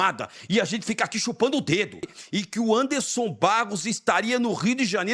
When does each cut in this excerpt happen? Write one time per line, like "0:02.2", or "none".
0:02.1